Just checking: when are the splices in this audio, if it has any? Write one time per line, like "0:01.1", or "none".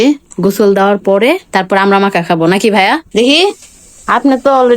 0:03.1